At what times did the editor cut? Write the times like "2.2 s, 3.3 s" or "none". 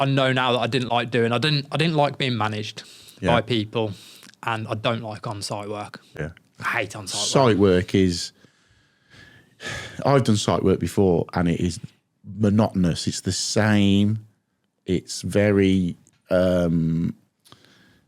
none